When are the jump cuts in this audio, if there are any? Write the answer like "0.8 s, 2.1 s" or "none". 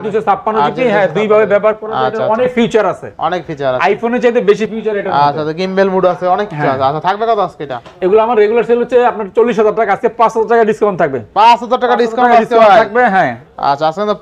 none

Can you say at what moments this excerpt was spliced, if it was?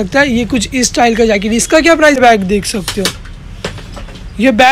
2.2 s

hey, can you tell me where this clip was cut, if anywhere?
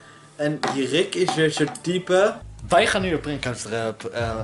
2.7 s

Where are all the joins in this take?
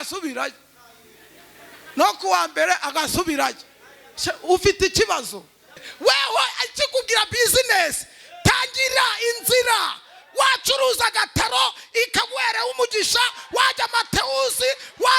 5.9 s

